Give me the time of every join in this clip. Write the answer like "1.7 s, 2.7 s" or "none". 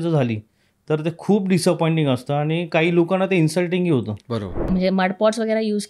4.7 s